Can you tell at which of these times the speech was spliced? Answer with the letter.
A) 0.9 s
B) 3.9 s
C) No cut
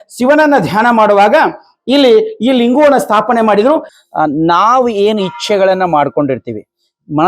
B